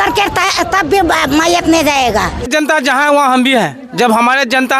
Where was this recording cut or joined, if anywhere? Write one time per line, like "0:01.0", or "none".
0:02.5

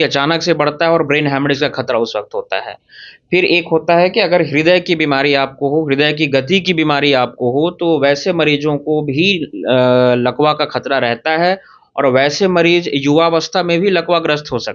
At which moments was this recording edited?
none

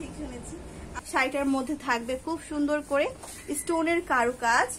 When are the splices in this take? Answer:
0:01.0

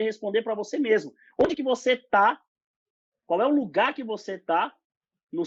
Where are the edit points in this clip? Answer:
none

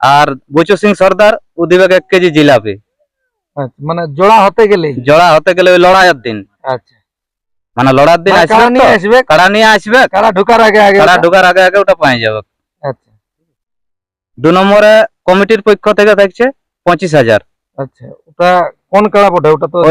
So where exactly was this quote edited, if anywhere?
none

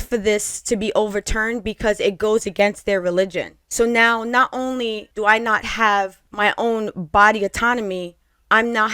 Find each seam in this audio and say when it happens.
0:05.1
0:06.2

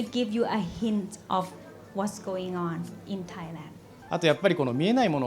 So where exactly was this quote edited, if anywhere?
0:03.9

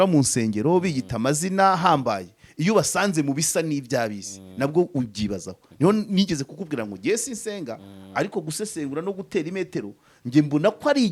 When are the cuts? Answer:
none

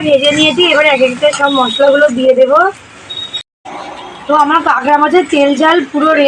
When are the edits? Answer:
0:03.6

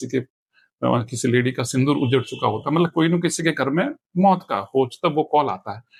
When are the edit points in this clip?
none

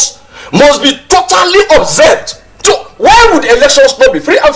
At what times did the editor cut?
0:03.2

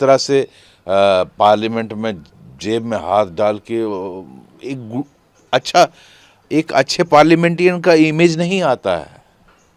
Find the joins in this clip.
none

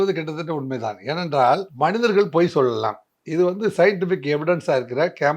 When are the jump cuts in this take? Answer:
0:01.7

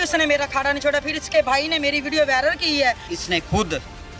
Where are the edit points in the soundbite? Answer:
0:03.1

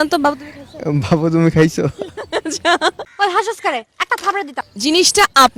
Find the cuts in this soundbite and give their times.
none

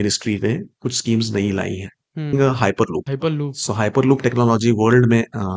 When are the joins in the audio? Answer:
0:02.3
0:03.1

